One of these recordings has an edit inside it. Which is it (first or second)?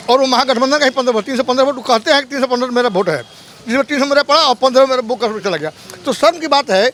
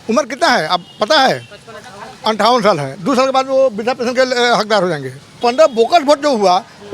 second